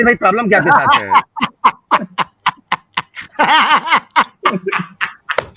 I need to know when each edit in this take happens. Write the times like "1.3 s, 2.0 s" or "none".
none